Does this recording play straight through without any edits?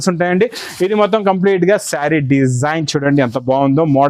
yes; 0 cuts

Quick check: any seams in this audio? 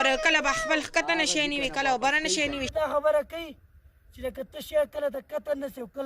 yes; 1 cut; at 2.7 s

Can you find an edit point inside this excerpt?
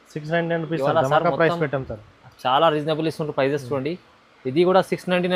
no; 0 cuts

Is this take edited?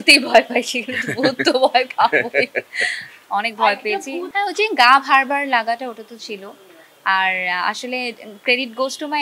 no; 0 cuts

